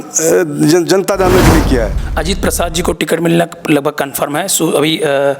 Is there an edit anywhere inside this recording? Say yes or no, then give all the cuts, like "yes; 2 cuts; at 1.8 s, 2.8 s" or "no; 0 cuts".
yes; 1 cut; at 1.9 s